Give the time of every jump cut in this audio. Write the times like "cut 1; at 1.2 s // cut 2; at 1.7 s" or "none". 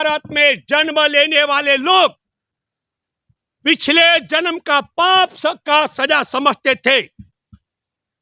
none